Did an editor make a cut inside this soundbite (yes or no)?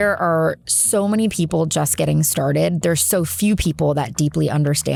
no